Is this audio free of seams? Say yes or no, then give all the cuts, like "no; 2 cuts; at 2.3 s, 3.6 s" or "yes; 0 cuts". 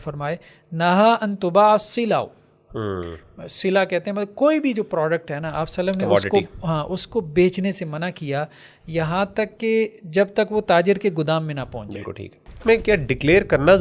no; 1 cut; at 12.6 s